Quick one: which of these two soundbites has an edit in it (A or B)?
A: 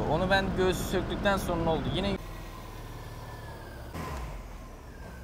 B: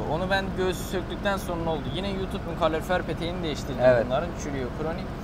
A